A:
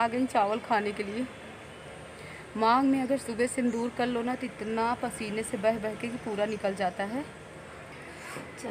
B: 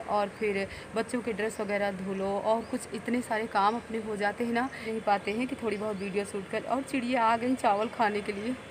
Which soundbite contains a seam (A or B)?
B